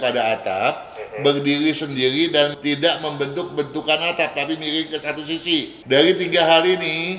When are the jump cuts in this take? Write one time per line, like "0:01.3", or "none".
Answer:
0:05.7